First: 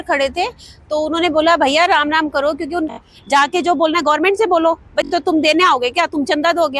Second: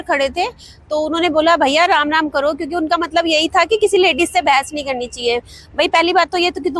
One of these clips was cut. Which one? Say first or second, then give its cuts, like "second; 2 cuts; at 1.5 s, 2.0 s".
first; 2 cuts; at 2.9 s, 5.1 s